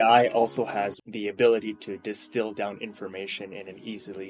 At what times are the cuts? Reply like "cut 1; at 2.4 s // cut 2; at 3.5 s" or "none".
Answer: cut 1; at 1.0 s